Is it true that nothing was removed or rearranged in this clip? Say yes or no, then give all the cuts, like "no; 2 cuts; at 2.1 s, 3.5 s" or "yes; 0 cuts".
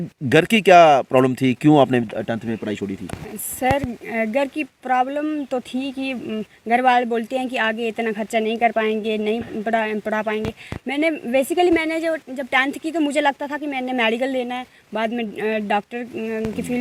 yes; 0 cuts